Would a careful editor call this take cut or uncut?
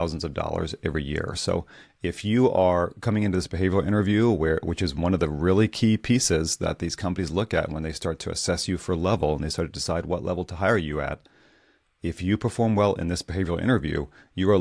uncut